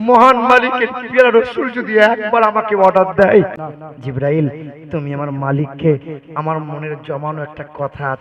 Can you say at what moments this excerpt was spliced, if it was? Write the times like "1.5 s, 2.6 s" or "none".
3.6 s